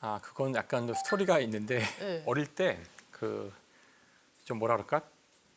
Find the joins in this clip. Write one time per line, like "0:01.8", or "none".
0:02.2